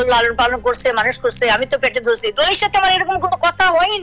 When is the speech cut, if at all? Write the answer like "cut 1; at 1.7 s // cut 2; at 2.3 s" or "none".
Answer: none